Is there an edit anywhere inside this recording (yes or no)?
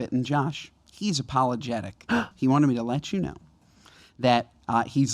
yes